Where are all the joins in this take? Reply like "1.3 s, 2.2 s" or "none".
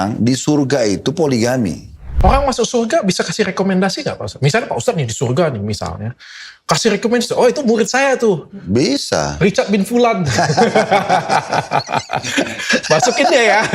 2.1 s